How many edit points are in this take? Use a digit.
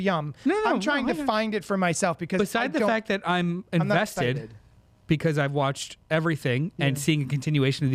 0